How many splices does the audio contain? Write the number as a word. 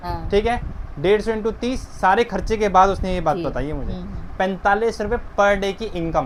zero